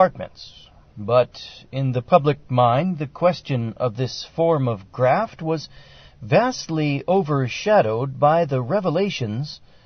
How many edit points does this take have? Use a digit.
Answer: 0